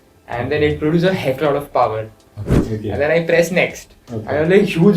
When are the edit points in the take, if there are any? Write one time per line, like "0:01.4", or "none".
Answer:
0:02.6